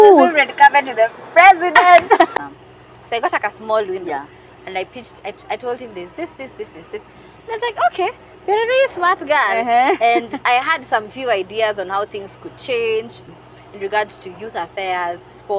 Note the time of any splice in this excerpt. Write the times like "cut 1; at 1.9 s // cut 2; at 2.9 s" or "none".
cut 1; at 2.3 s // cut 2; at 13.2 s

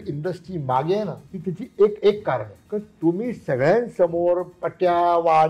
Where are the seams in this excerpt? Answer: cut 1; at 1.3 s // cut 2; at 2.6 s

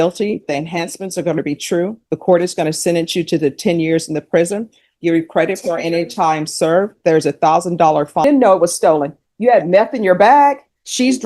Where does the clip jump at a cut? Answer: cut 1; at 8.2 s

